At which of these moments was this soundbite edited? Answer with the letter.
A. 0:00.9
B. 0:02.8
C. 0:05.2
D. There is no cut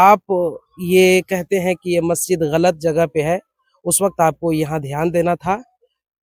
D